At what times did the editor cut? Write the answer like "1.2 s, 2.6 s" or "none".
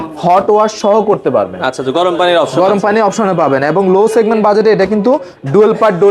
none

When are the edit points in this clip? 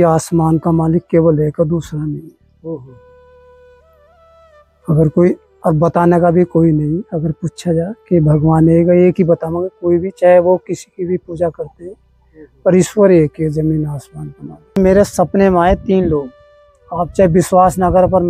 14.8 s

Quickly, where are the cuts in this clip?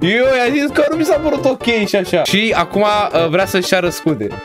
2.3 s

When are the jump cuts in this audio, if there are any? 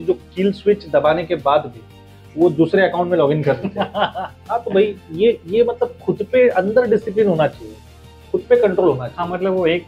none

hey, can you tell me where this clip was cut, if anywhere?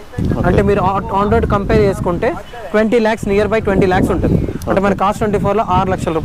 none

